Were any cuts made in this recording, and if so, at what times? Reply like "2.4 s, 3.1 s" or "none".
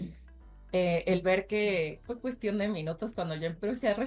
2.1 s